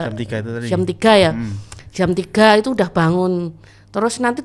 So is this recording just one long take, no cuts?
yes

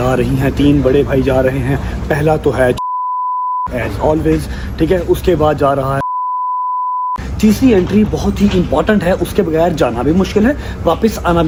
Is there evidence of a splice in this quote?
no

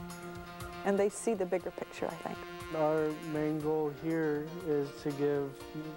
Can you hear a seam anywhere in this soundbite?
yes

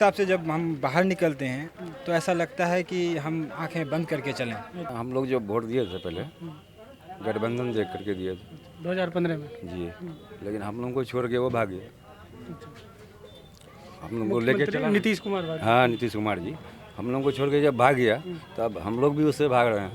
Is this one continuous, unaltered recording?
no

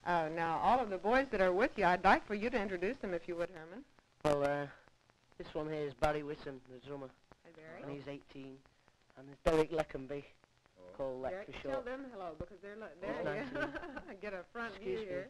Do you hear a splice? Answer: yes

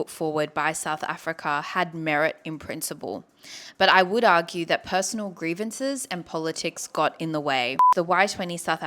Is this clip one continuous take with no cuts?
no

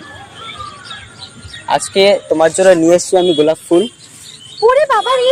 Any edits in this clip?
no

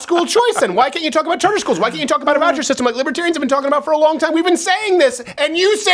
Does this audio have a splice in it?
no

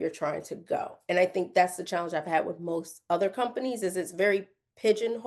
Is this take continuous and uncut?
yes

